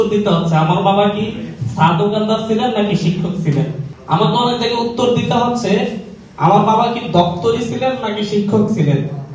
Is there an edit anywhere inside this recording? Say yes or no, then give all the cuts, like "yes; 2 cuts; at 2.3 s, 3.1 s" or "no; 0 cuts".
no; 0 cuts